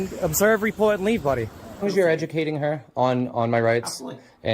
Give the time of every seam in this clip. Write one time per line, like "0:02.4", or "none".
0:01.9